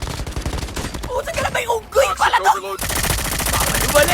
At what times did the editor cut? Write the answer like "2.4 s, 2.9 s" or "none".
2.8 s